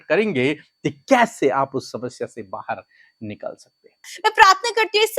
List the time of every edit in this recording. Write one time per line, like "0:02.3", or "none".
0:04.1